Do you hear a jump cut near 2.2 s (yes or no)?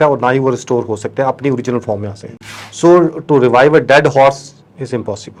no